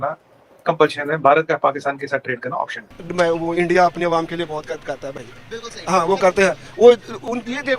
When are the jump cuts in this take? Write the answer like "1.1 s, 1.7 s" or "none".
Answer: 2.9 s